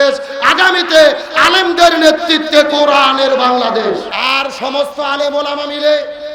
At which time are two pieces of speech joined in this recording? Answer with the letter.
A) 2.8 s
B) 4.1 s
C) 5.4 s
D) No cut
B